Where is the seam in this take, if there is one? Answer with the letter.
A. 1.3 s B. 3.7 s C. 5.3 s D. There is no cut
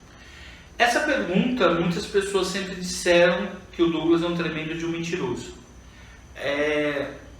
D